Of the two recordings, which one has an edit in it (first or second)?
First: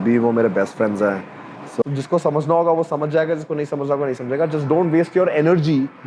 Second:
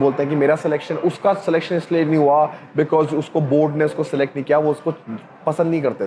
first